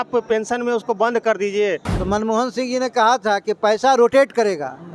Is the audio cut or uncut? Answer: cut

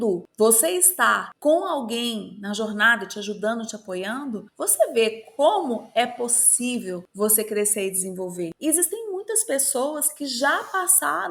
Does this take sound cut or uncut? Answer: uncut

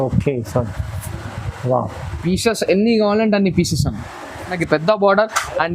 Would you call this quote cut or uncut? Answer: cut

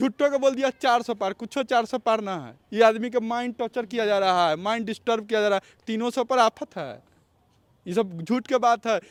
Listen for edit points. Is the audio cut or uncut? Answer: uncut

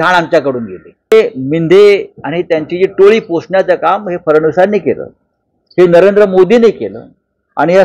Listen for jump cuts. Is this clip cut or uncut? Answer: cut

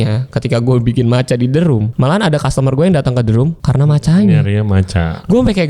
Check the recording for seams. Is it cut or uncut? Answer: cut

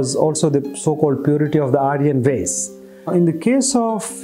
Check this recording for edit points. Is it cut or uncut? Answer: uncut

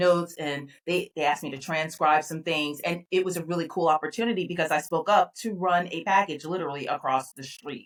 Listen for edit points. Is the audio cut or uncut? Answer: uncut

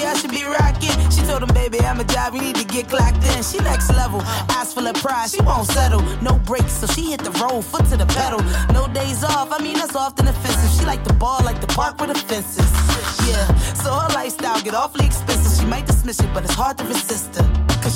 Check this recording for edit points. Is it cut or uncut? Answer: uncut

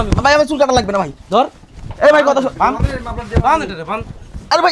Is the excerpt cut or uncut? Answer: uncut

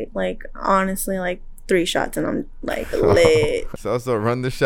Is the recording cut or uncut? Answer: cut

